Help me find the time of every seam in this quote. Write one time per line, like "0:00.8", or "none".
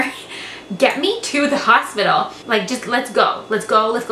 0:02.4